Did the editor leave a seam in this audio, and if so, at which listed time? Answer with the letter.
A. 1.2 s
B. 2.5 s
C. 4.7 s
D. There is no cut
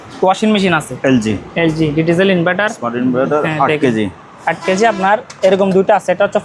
D